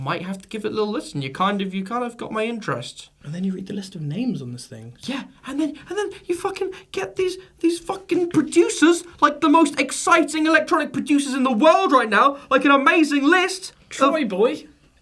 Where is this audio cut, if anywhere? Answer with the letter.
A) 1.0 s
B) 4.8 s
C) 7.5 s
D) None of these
C